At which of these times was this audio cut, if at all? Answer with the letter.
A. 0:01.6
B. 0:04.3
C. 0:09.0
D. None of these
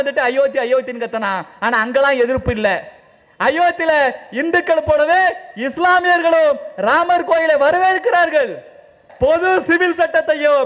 C